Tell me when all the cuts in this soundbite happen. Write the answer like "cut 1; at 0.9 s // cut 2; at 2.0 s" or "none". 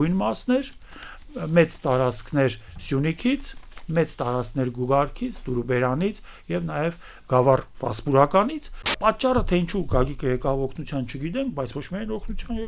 cut 1; at 8.9 s